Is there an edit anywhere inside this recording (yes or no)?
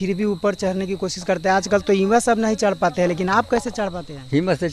no